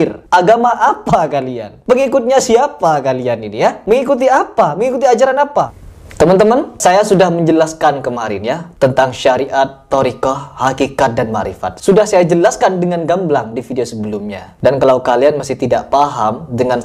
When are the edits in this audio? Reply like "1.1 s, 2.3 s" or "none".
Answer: 5.7 s